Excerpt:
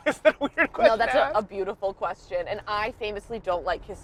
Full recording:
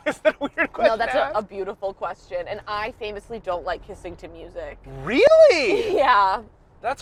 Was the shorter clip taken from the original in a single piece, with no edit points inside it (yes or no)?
yes